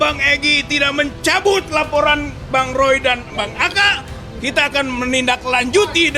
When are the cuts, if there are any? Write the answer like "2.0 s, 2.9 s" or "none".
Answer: none